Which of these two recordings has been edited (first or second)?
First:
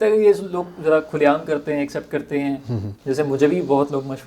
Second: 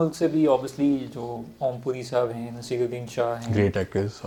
first